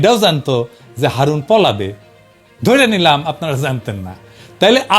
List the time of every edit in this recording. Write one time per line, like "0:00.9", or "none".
none